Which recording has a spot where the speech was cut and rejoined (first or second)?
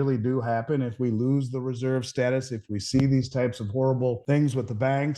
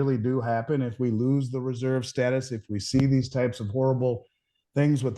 first